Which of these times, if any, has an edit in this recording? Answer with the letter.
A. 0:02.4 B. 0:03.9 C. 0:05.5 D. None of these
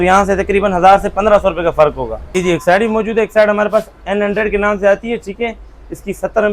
A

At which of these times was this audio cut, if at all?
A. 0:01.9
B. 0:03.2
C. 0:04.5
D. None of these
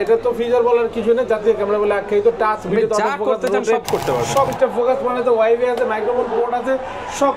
C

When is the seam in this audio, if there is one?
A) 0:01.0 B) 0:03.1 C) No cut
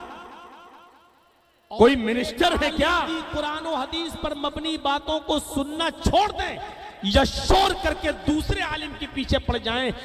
B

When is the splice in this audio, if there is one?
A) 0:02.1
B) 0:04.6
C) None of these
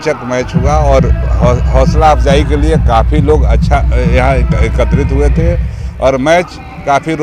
C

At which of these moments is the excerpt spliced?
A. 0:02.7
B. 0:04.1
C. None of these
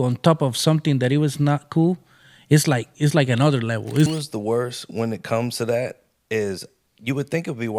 B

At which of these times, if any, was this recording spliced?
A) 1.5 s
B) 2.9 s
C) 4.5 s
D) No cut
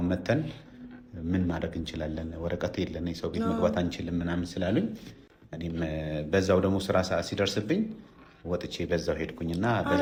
D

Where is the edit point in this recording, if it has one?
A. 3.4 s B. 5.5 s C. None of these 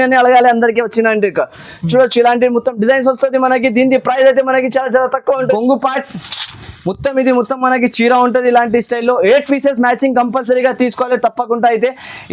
B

